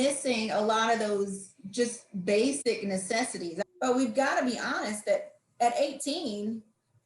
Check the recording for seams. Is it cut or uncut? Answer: cut